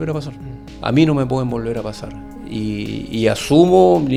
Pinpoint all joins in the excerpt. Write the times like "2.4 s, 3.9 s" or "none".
none